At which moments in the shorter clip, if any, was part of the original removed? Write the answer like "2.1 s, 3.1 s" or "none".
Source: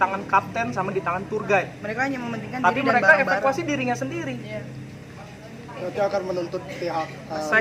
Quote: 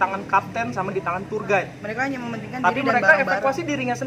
none

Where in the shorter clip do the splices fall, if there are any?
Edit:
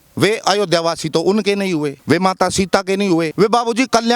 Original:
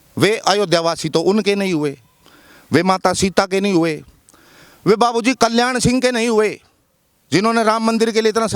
2.0 s, 3.3 s

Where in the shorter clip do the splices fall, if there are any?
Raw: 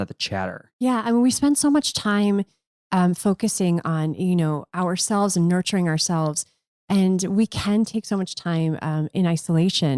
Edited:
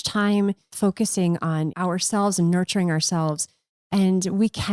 0.7 s, 1.7 s

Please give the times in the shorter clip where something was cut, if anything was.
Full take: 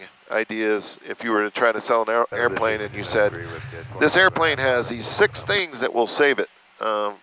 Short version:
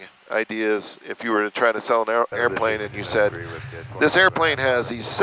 none

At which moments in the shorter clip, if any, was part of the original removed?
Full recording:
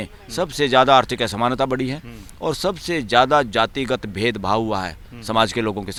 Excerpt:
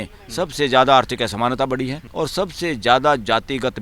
2.0 s

